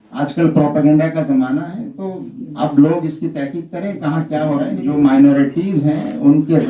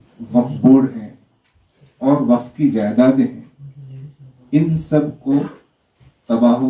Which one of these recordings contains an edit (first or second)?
first